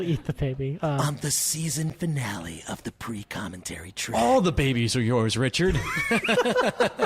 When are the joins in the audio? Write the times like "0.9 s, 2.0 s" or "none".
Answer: 1.0 s, 4.1 s